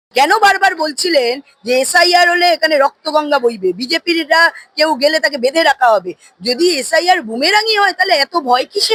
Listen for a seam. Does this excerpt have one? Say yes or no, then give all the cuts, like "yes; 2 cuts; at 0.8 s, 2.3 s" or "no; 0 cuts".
no; 0 cuts